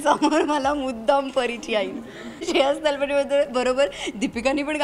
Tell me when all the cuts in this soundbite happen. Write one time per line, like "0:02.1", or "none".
0:02.5